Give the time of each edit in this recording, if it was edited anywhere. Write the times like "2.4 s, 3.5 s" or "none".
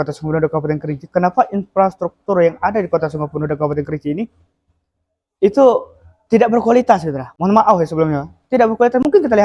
none